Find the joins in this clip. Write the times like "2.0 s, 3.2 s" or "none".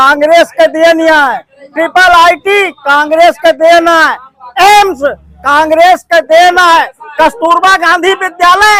none